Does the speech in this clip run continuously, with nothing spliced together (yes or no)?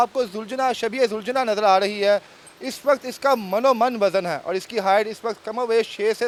yes